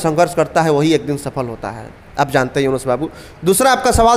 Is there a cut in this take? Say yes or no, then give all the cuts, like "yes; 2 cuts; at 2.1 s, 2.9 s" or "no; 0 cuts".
no; 0 cuts